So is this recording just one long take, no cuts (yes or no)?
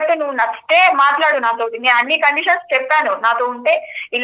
yes